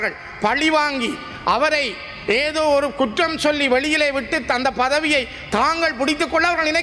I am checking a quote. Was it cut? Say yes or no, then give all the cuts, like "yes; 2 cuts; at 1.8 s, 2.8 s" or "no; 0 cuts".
no; 0 cuts